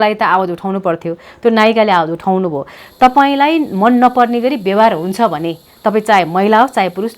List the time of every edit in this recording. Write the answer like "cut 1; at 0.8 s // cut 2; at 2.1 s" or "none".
cut 1; at 2.8 s